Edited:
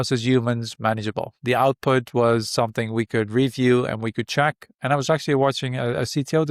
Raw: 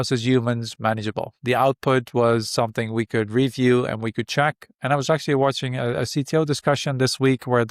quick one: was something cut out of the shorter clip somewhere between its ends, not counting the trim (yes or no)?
no